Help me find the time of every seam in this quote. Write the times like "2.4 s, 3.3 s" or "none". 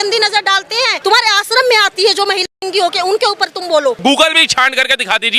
1.0 s, 4.0 s